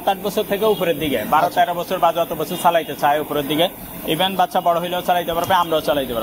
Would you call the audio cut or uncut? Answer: uncut